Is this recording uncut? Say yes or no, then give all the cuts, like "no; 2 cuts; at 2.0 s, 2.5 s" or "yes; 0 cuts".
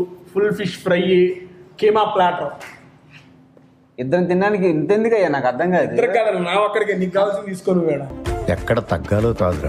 yes; 0 cuts